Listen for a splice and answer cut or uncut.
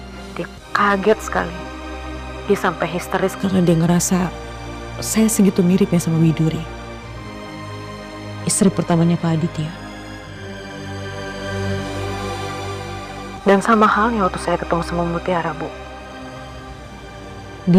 uncut